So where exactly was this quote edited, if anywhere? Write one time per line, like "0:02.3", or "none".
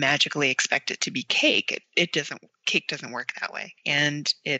none